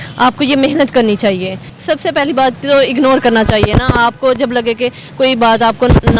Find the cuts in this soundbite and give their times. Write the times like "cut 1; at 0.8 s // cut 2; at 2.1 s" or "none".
cut 1; at 1.7 s